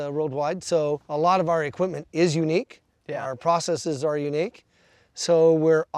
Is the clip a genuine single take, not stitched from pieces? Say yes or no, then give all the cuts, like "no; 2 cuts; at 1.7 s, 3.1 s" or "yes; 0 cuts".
no; 1 cut; at 1.0 s